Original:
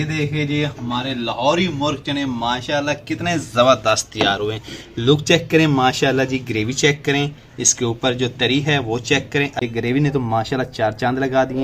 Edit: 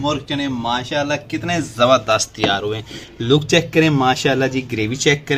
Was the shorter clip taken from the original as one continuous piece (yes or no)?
yes